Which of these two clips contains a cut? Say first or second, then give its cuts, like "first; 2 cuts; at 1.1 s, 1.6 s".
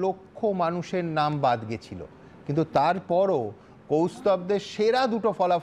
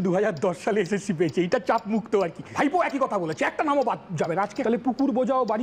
second; 2 cuts; at 2.4 s, 4.6 s